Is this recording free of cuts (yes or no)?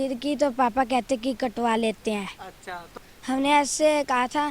no